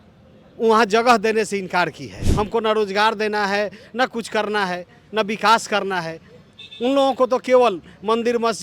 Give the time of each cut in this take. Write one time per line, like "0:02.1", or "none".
0:02.2